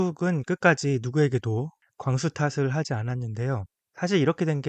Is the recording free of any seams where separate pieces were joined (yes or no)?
no